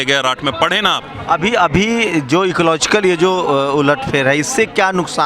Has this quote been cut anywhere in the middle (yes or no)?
no